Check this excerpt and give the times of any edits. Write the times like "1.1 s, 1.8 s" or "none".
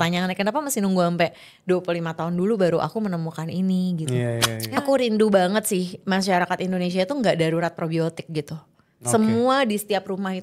4.6 s

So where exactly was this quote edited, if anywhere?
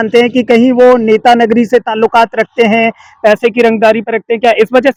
none

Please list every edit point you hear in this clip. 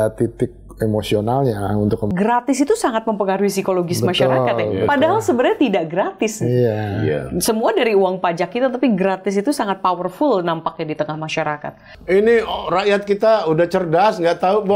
2.1 s, 11.9 s

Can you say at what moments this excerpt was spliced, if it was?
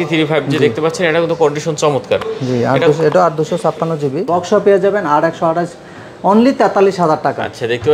4.2 s

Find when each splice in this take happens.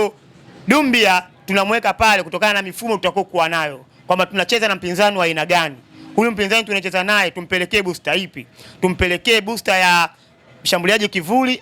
none

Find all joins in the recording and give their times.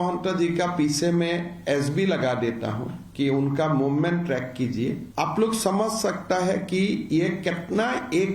5.1 s

